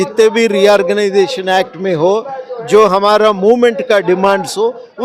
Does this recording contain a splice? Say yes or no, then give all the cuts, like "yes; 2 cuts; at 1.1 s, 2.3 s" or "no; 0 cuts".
no; 0 cuts